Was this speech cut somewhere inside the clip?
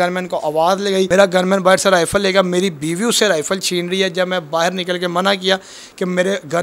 yes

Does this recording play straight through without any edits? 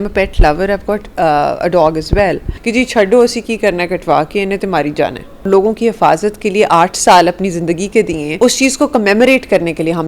no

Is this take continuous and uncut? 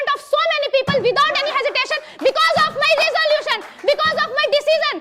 yes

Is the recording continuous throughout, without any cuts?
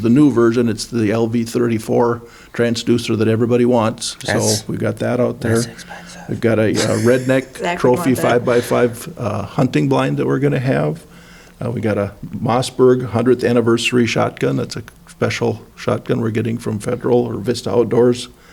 yes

